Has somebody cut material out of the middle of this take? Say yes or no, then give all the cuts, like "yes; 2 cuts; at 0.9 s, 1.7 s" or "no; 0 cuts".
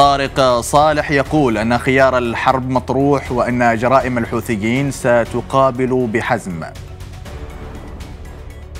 no; 0 cuts